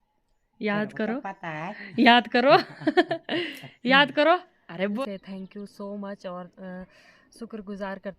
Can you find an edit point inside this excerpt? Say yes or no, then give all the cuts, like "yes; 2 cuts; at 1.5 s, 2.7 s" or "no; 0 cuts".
yes; 1 cut; at 5.0 s